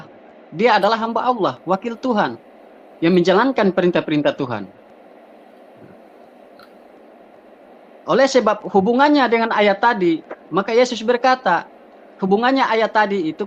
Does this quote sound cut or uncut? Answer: uncut